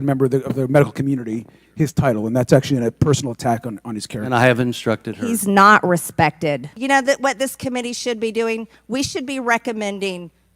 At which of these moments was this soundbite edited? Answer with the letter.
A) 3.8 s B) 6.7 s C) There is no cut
B